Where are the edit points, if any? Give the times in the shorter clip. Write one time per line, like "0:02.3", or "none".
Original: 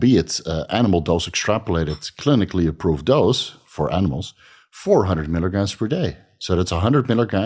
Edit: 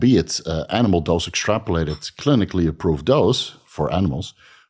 none

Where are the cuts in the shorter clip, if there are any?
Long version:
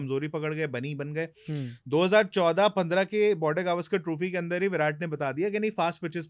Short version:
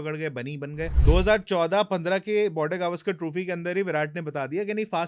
0:01.0

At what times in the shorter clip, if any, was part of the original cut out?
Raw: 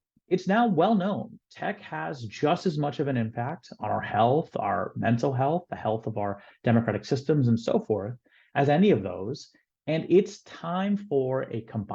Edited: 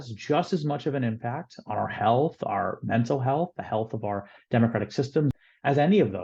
0:05.3

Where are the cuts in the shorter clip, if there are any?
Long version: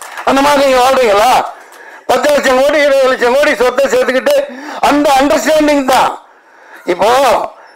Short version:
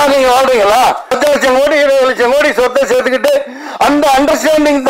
0:01.1

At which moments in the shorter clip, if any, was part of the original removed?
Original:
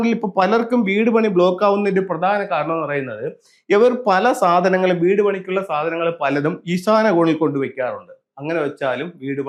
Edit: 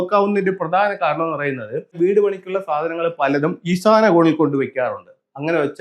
0:02.0

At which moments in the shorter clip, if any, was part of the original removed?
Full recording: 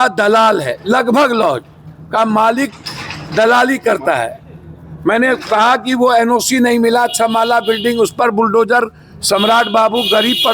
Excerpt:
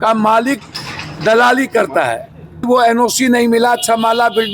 0:02.6

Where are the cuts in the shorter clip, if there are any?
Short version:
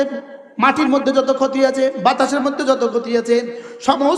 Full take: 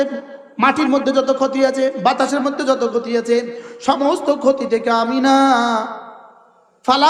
none

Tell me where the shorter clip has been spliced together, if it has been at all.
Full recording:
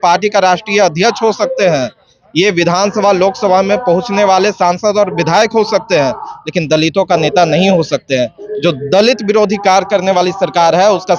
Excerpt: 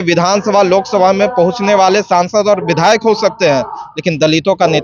none

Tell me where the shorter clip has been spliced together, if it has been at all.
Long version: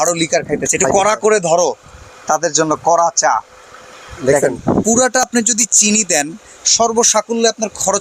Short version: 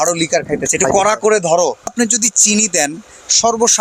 0:01.9

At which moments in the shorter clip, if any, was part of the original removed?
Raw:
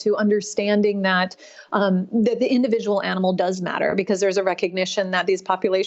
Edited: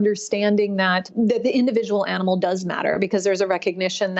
0:01.1

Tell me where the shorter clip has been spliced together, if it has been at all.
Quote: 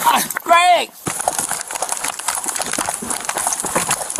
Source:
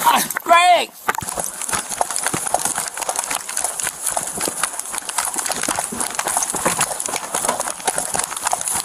0:01.0
0:02.2

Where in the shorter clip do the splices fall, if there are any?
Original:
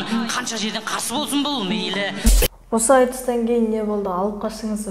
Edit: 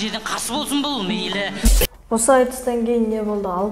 none

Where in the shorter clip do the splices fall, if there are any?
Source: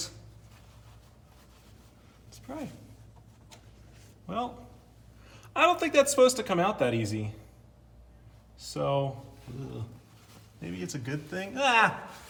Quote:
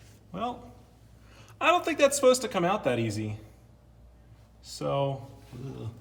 none

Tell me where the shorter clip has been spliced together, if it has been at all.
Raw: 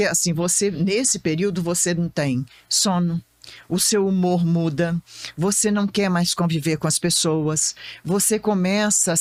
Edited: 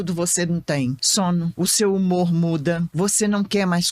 0:01.2
0:02.9

